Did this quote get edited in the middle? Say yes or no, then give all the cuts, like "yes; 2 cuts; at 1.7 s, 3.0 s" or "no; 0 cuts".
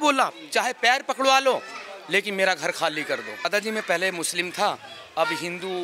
yes; 1 cut; at 3.4 s